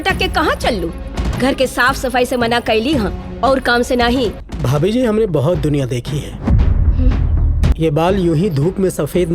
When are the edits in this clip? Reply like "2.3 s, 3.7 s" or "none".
1.3 s, 4.5 s, 7.7 s